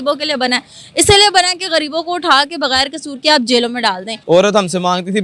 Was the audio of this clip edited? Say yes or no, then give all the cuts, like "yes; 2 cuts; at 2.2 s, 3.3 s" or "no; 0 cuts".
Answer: yes; 1 cut; at 4.1 s